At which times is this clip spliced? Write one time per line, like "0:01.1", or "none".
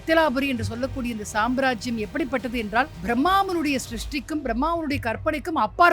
0:03.0

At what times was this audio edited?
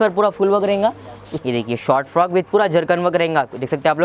0:01.3

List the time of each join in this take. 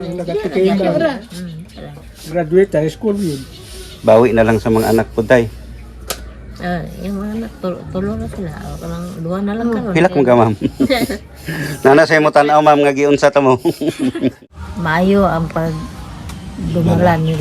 0:14.5

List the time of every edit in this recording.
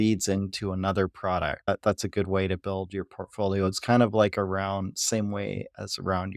0:01.7

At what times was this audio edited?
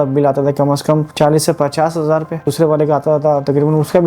0:01.1
0:02.5

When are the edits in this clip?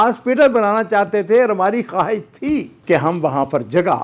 0:02.7

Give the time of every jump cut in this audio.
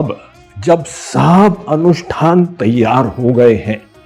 none

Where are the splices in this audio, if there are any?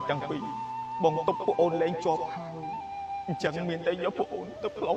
none

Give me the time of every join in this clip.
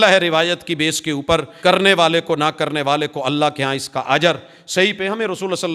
0:01.5

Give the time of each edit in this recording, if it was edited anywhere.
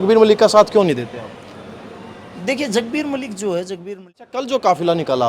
0:03.8

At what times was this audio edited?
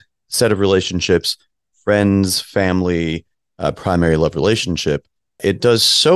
none

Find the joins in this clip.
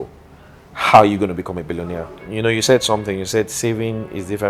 0:02.1

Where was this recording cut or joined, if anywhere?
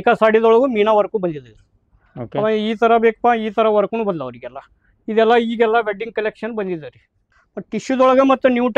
0:07.3

